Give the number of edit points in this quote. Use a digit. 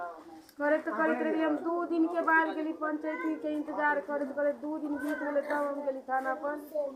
0